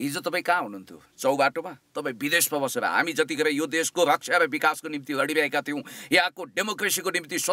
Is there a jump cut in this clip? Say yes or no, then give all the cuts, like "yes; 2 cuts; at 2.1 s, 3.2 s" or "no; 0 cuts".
no; 0 cuts